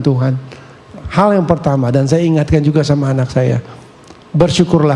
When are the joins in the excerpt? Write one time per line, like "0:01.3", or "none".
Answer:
none